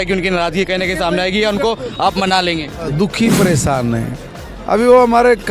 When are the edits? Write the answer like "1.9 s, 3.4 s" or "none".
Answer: 2.9 s